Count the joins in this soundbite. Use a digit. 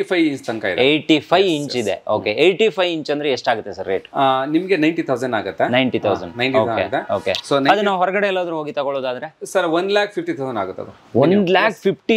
0